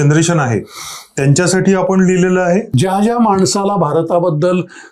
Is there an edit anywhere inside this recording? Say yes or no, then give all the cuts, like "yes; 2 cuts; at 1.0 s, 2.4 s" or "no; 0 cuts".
yes; 1 cut; at 2.7 s